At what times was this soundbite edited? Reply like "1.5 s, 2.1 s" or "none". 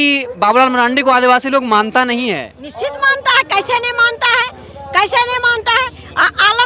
none